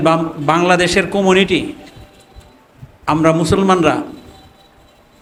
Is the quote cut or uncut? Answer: uncut